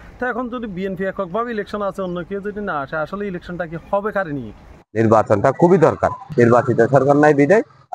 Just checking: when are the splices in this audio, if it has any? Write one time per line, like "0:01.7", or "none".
0:04.8
0:06.2

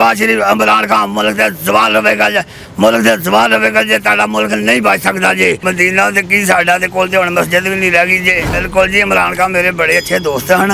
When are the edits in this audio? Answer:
0:05.6
0:08.6

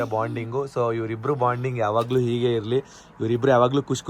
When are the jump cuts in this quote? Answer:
none

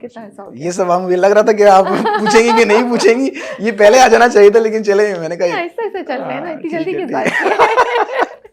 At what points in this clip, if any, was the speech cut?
none

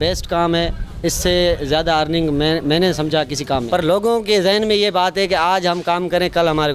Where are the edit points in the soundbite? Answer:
0:03.6

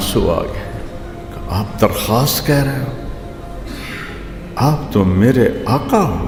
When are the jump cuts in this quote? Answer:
none

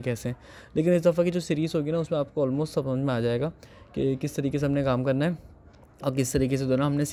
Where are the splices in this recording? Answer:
none

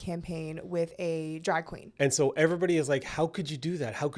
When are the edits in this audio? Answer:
0:01.8

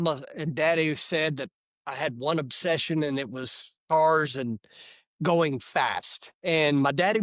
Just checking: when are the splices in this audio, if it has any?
none

